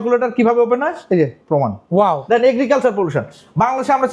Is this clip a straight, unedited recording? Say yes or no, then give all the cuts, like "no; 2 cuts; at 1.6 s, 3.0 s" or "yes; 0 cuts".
no; 1 cut; at 2.2 s